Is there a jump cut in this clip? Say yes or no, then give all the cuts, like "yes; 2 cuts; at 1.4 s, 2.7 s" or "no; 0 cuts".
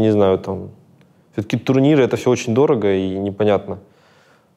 no; 0 cuts